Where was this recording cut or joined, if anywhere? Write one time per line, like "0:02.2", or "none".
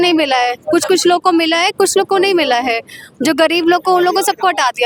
none